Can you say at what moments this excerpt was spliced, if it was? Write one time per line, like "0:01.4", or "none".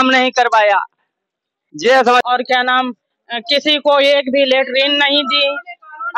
0:02.2